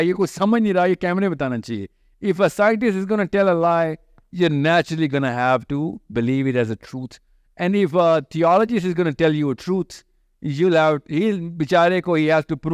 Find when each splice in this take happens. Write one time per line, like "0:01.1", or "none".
none